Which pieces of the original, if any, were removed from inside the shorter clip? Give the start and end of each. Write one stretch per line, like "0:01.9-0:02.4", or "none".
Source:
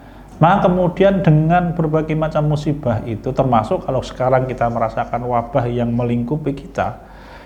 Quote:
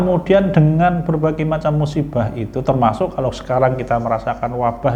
none